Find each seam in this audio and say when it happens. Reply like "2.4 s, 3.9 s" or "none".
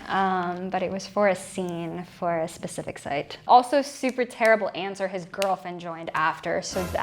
3.4 s